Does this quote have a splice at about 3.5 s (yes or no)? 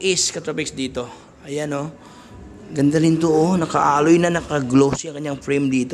no